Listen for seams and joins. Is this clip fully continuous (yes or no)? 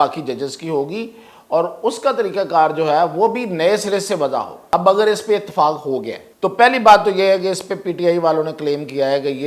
no